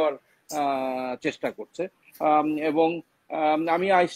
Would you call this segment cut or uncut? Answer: uncut